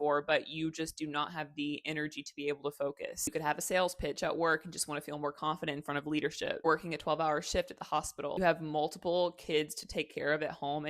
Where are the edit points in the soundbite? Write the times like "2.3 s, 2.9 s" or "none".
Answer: 3.2 s